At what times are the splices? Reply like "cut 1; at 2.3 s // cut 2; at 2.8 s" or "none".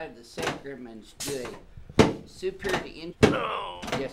cut 1; at 3.0 s